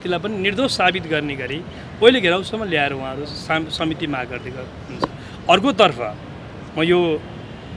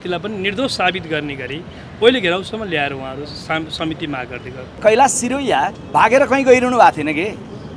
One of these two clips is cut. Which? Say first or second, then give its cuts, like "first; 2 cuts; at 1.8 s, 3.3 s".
second; 1 cut; at 4.8 s